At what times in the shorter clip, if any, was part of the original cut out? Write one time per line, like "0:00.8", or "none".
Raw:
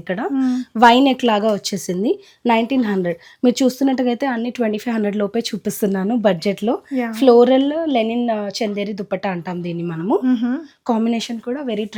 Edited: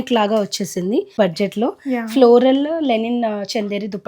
0:01.2